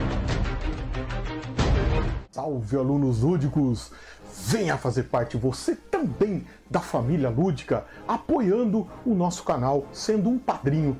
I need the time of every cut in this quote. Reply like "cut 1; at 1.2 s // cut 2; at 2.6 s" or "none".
cut 1; at 2.2 s